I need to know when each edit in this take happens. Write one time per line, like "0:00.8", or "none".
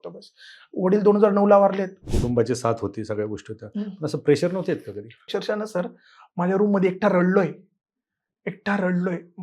0:02.0
0:05.2

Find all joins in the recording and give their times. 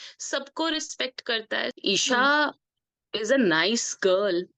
0:01.8

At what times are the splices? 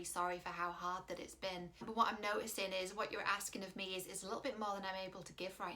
0:01.8

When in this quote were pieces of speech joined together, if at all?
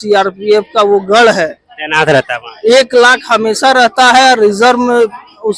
none

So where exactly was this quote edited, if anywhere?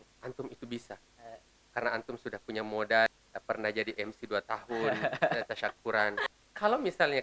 0:03.1
0:06.2

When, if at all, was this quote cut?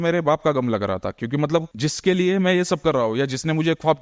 0:01.7

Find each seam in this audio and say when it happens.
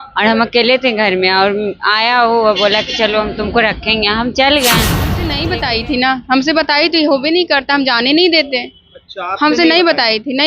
0:05.3

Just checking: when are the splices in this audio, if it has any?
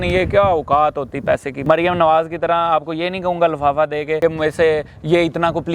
0:01.5
0:04.2

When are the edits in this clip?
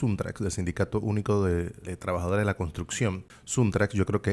0:01.8
0:03.3

